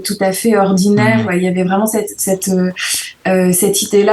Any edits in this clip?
yes; 1 cut; at 1.3 s

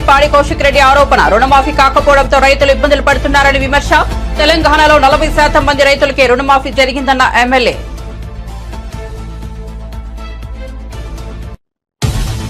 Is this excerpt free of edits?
no; 1 cut; at 11.6 s

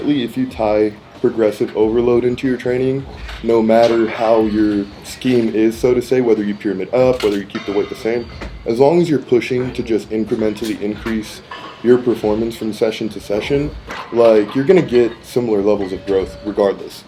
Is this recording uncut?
yes; 0 cuts

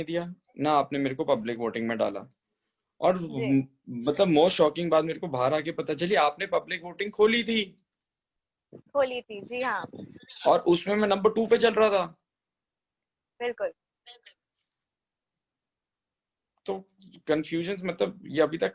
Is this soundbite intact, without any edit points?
yes; 0 cuts

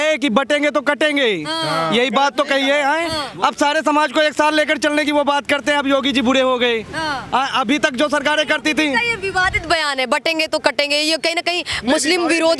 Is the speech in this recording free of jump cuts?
yes; 0 cuts

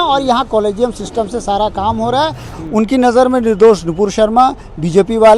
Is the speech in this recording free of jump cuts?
no; 1 cut; at 2.6 s

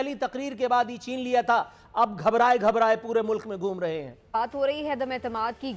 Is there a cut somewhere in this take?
yes; 1 cut; at 4.1 s

